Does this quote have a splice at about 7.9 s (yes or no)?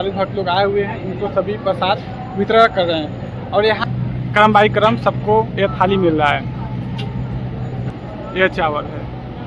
yes